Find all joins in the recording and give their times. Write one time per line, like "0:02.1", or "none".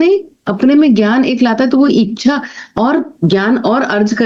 none